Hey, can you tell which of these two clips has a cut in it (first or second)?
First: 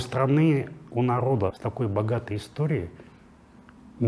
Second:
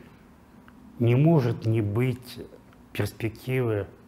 first